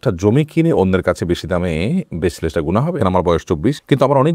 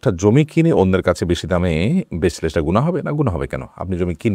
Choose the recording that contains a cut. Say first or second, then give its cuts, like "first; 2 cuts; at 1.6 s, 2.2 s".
first; 1 cut; at 3.0 s